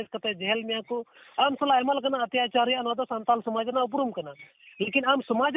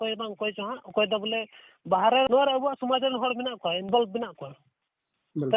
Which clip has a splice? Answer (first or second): second